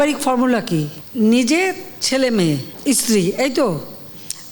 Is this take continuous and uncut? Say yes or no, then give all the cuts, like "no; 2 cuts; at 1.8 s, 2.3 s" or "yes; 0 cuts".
no; 2 cuts; at 1.0 s, 2.7 s